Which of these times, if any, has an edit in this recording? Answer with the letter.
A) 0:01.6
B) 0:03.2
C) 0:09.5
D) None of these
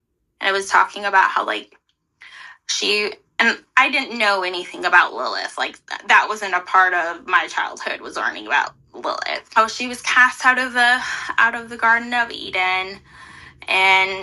C